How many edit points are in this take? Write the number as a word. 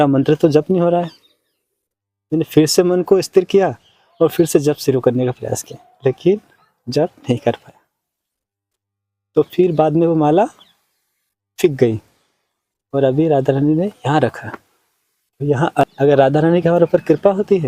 one